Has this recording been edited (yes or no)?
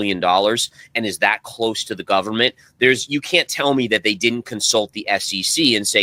no